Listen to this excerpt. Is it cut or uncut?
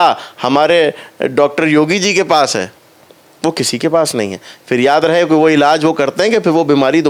uncut